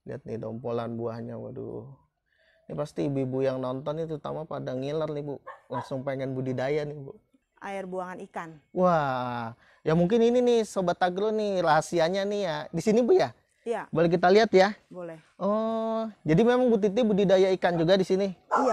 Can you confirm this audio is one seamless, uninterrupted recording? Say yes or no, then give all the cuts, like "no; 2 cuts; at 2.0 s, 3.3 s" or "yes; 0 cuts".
no; 1 cut; at 7.4 s